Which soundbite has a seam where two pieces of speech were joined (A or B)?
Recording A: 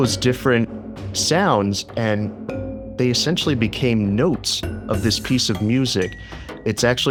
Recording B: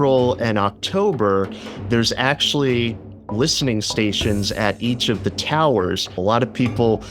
B